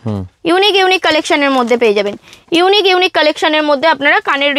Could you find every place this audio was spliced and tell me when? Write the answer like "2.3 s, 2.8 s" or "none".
none